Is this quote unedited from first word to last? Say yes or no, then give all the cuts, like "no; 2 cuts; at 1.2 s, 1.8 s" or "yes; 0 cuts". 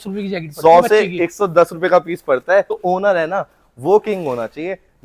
no; 1 cut; at 2.8 s